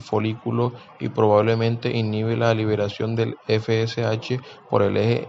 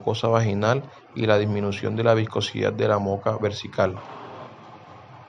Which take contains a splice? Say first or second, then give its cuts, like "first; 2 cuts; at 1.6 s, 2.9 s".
second; 1 cut; at 4.0 s